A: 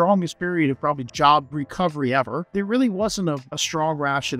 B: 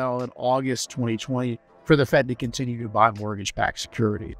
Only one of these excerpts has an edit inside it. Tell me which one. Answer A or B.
A